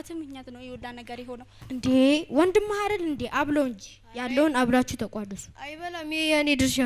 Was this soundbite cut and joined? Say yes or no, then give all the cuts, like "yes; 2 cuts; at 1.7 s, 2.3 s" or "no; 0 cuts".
yes; 1 cut; at 1.6 s